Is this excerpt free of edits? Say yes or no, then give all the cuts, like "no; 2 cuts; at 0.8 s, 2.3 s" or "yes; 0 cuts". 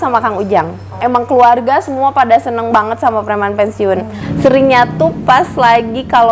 yes; 0 cuts